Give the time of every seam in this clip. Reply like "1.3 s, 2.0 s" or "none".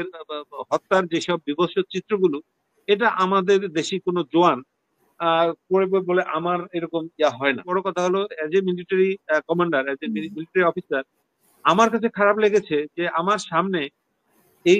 7.7 s